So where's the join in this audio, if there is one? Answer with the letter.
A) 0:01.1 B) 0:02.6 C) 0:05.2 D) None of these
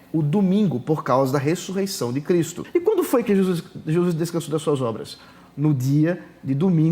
B